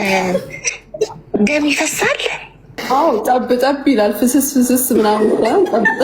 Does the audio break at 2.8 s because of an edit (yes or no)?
yes